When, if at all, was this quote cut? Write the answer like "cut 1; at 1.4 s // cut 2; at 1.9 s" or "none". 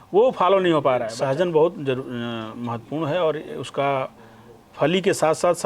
cut 1; at 1.1 s